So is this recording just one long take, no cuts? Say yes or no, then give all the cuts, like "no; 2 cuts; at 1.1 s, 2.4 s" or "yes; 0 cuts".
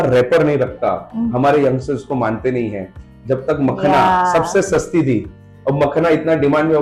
yes; 0 cuts